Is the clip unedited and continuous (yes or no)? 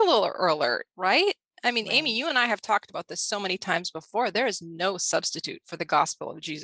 yes